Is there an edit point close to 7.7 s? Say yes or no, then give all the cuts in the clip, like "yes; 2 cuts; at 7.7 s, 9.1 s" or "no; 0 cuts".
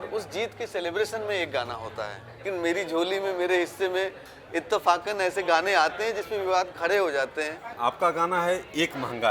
yes; 2 cuts; at 2.4 s, 7.7 s